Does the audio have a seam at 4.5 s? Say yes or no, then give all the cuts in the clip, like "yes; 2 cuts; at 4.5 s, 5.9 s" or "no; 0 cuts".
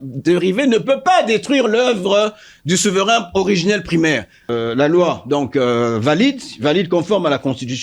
yes; 1 cut; at 4.5 s